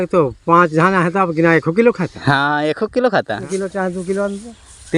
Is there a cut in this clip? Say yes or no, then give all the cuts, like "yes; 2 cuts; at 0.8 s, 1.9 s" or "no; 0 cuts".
yes; 1 cut; at 3.4 s